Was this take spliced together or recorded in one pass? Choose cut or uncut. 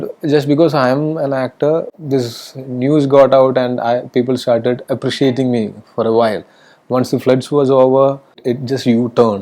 cut